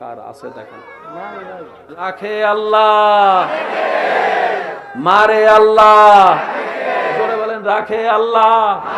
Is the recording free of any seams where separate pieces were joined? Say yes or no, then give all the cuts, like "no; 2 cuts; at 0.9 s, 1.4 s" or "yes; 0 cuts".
no; 1 cut; at 2.0 s